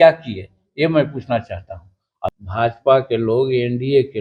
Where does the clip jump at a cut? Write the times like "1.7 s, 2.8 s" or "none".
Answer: 2.2 s